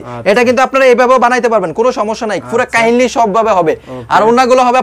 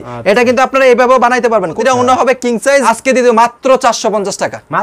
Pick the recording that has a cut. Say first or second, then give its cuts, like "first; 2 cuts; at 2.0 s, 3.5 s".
second; 2 cuts; at 1.8 s, 2.8 s